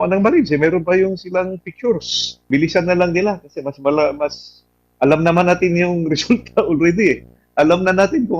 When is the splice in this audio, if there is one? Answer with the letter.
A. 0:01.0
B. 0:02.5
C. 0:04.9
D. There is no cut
B